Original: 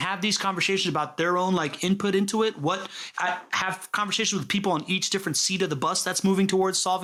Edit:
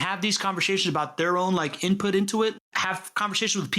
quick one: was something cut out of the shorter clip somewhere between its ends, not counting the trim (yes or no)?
yes